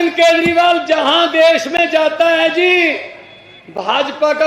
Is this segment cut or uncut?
uncut